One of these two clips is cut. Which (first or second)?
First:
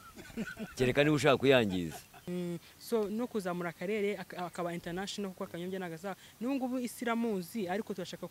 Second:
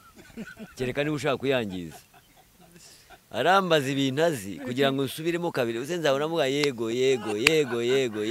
first